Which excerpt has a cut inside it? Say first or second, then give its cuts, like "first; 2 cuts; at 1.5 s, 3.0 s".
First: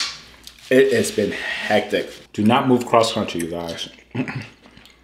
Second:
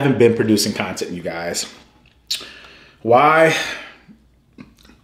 first; 1 cut; at 2.2 s